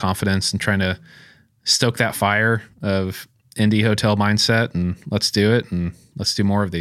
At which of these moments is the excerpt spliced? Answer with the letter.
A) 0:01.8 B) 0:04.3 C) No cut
C